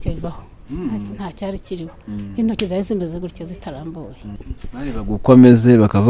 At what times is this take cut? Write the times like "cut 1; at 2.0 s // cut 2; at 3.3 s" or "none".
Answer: cut 1; at 4.4 s